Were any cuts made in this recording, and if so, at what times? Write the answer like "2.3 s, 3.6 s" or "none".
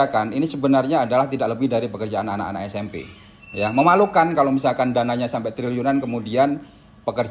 3.4 s